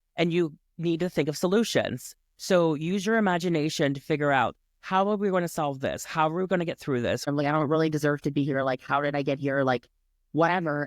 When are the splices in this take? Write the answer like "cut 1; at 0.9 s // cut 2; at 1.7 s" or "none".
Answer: cut 1; at 7.3 s